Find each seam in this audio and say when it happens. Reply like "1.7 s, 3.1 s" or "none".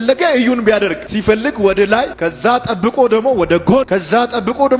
1.1 s, 2.1 s, 3.9 s